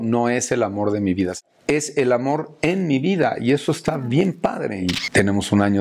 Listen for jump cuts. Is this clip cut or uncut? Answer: cut